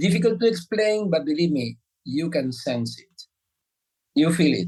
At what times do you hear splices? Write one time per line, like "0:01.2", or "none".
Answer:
none